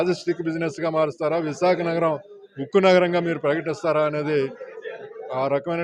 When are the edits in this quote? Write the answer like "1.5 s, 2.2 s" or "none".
none